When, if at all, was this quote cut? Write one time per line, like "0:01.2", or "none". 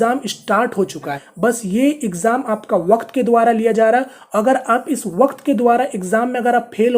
0:01.2